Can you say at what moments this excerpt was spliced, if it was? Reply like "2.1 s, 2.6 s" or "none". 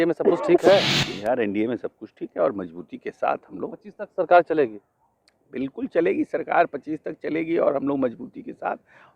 1.0 s